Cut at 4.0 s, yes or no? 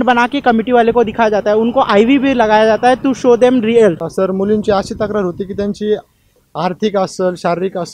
yes